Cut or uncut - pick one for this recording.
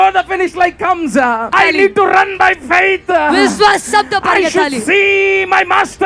cut